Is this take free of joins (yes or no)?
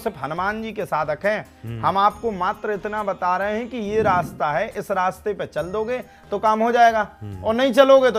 yes